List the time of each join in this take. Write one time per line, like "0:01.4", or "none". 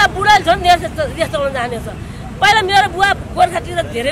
none